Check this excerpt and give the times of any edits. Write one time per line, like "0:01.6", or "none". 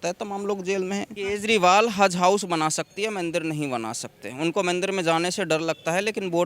0:01.1